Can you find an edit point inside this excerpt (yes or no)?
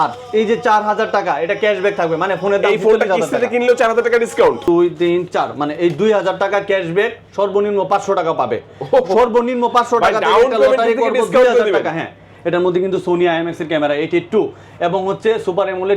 yes